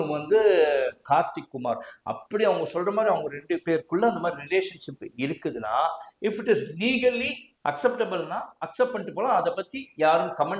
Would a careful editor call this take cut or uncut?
cut